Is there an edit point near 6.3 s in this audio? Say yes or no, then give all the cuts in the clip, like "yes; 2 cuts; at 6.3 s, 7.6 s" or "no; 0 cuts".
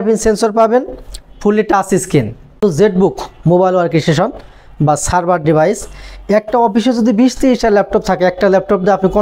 no; 1 cut; at 2.6 s